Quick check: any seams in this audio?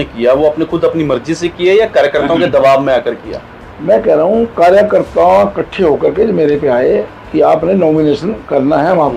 no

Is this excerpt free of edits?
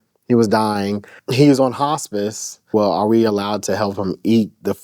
no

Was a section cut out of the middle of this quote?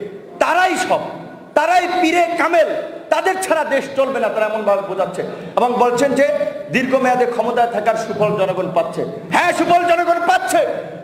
no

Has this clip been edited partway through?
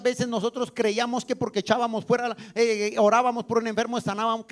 no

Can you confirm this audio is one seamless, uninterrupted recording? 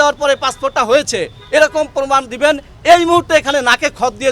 yes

